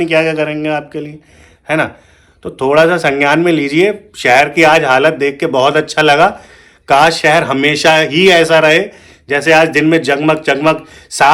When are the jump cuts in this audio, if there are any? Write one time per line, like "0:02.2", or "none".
none